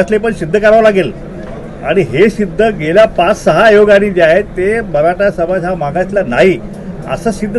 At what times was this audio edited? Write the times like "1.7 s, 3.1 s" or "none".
none